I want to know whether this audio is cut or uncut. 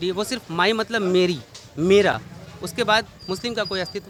uncut